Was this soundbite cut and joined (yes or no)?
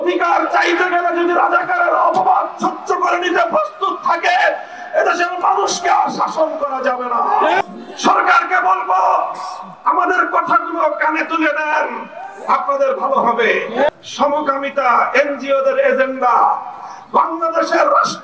yes